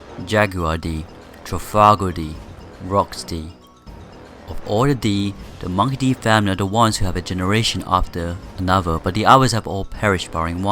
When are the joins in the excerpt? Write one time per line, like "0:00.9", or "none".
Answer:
0:08.4